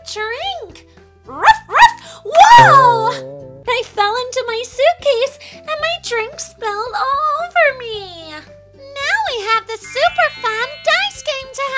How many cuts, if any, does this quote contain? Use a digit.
2